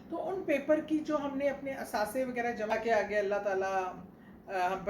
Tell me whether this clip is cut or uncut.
cut